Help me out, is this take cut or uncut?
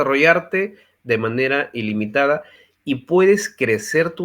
uncut